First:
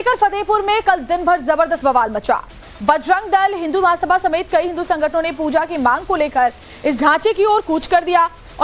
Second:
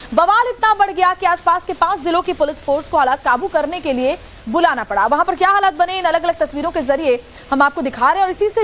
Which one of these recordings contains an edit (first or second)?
first